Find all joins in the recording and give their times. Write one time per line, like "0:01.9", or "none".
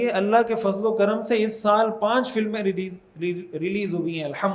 none